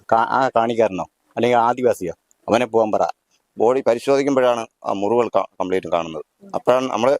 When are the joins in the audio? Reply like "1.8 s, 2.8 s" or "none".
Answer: 3.2 s